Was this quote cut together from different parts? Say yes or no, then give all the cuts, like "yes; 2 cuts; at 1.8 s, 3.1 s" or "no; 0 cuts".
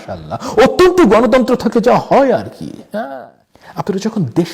yes; 1 cut; at 3.1 s